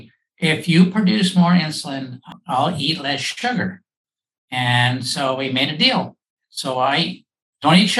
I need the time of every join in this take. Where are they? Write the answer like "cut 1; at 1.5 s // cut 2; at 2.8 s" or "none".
none

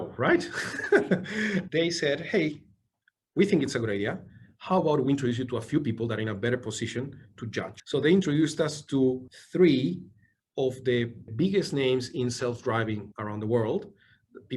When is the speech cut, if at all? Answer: cut 1; at 7.8 s // cut 2; at 9.3 s // cut 3; at 11.2 s

